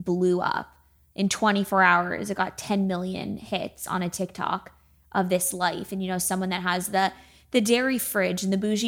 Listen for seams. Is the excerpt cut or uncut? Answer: uncut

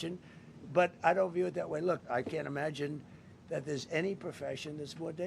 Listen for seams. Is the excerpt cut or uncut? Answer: cut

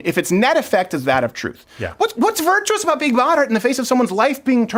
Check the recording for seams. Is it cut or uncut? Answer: uncut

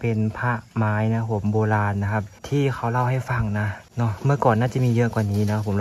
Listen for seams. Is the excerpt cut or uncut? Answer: cut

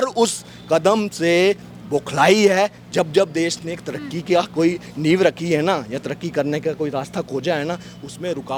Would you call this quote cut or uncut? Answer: uncut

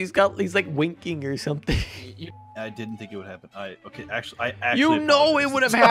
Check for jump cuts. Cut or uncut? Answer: cut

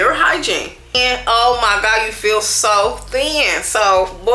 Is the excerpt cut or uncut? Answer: cut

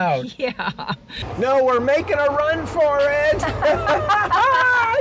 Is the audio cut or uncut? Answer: cut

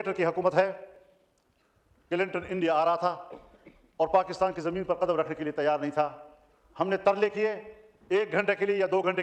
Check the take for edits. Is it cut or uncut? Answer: uncut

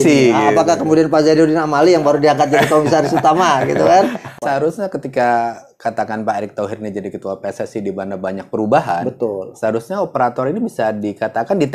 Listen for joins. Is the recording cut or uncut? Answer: cut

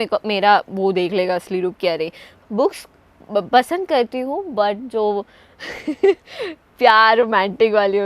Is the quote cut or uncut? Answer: cut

